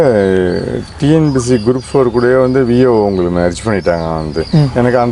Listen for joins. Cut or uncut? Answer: uncut